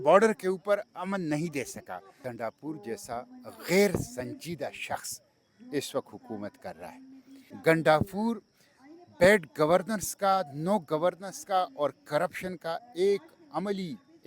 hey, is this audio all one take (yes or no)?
no